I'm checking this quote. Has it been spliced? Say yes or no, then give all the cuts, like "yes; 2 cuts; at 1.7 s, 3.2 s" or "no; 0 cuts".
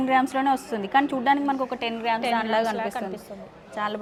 no; 0 cuts